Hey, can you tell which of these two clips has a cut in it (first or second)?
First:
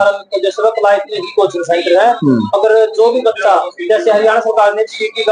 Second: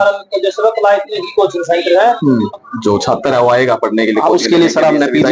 second